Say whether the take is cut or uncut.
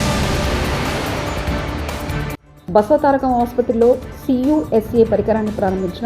uncut